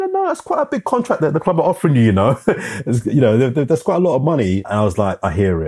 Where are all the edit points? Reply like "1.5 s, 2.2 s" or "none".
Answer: 4.6 s